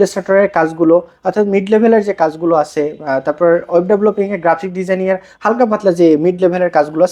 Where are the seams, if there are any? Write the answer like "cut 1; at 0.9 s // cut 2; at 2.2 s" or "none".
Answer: none